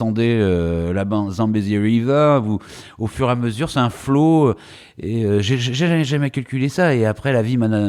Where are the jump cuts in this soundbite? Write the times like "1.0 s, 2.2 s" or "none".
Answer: none